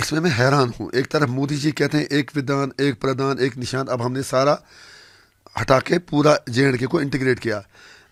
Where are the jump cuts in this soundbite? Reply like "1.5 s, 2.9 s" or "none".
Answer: none